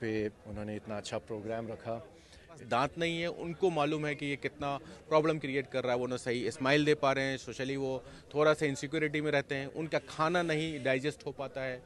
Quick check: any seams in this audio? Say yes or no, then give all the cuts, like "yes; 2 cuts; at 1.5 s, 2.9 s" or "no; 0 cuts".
yes; 1 cut; at 2.6 s